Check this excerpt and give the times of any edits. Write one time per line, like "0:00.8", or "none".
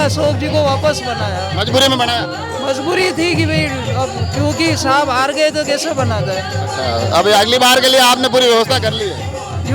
none